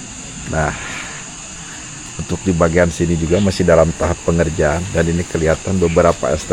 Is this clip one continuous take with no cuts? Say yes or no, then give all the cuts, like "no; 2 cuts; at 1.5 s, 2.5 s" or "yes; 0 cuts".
yes; 0 cuts